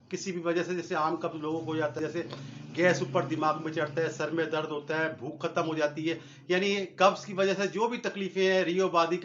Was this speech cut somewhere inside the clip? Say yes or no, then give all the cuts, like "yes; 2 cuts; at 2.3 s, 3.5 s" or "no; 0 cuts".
yes; 1 cut; at 2.0 s